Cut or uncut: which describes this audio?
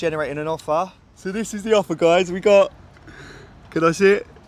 uncut